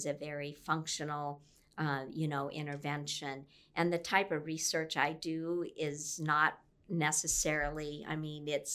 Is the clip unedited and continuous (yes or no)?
yes